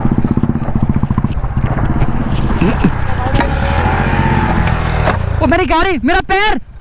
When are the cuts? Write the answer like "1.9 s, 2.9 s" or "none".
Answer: none